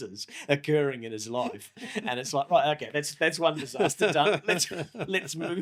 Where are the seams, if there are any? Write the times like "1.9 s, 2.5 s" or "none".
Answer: none